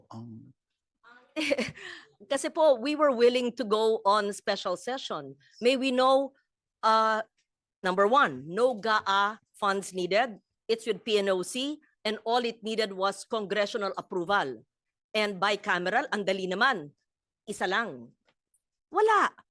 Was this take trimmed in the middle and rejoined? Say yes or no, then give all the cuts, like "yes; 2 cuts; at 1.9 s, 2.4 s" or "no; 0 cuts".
yes; 1 cut; at 18.5 s